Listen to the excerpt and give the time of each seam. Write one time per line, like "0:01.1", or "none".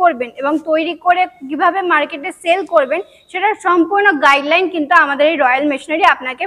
none